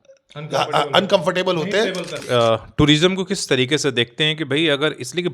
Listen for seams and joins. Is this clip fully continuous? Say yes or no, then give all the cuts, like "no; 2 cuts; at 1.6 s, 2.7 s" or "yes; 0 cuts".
no; 1 cut; at 2.2 s